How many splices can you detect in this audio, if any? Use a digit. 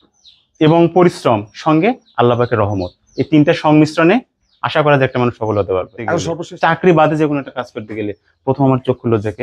1